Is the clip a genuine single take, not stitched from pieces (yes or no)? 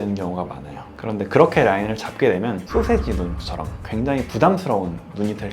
no